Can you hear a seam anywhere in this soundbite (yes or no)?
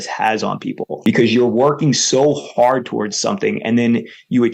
yes